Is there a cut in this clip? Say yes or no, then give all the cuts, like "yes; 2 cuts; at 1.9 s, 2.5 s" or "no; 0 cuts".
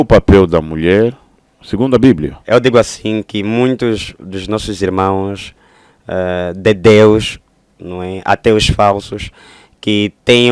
yes; 1 cut; at 2.3 s